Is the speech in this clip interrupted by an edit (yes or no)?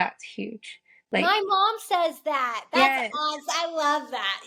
no